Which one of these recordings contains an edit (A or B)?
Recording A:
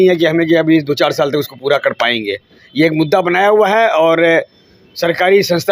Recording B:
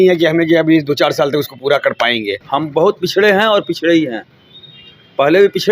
B